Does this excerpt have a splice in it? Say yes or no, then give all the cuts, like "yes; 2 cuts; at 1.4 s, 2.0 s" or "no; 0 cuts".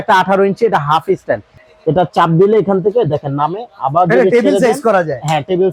yes; 1 cut; at 1.5 s